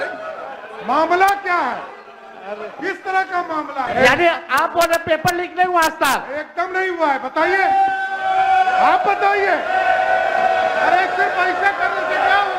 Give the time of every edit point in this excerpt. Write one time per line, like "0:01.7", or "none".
0:03.9